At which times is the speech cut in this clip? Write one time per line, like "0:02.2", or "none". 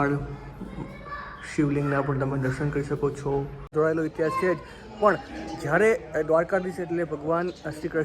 0:03.7